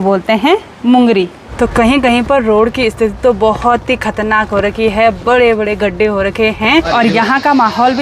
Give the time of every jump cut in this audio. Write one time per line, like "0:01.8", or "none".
0:01.4
0:06.9